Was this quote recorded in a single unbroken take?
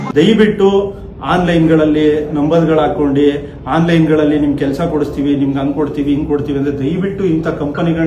yes; 0 cuts

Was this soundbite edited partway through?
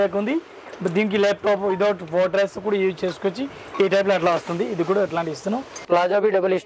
yes; 1 cut; at 5.7 s

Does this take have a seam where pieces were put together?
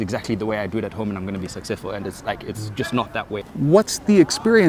no; 0 cuts

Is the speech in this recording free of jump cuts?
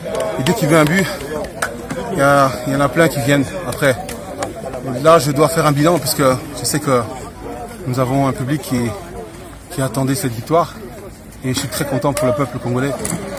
yes; 0 cuts

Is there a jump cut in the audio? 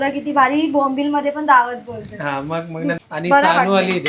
yes; 1 cut; at 3.0 s

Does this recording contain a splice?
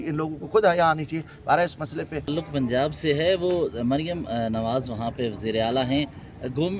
yes; 1 cut; at 2.3 s

